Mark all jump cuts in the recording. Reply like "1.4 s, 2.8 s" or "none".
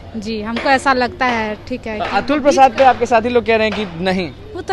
none